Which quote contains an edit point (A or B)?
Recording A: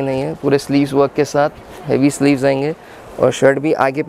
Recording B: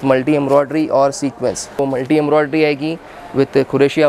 B